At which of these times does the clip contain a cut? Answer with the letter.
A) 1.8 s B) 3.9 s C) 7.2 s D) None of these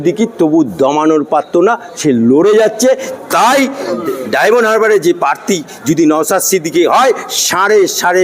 B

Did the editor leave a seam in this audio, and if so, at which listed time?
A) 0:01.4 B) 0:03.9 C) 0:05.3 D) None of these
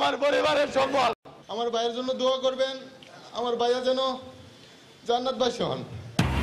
A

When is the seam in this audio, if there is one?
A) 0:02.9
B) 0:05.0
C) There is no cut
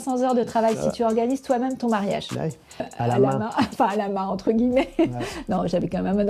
A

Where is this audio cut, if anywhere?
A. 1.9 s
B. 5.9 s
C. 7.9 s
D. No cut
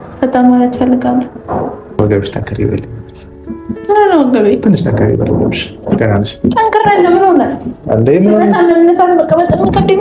A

